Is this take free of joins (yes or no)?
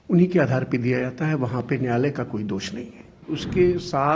no